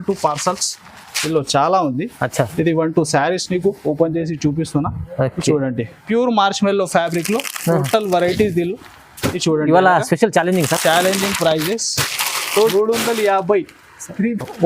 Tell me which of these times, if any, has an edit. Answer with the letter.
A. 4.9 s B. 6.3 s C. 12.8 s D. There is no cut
C